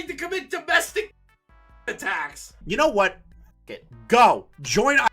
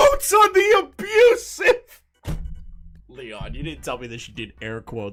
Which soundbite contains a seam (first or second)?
first